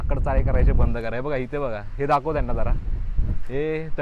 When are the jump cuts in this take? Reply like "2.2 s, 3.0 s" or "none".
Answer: none